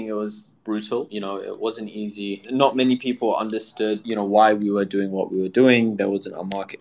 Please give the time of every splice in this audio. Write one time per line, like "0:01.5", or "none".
0:01.1
0:02.4
0:04.0